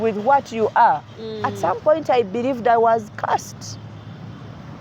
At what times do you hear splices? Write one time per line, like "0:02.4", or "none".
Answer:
0:01.4